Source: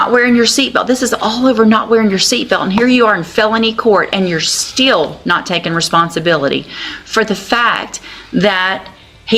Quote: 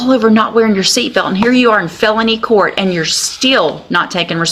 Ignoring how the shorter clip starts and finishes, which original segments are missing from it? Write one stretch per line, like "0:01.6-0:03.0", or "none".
none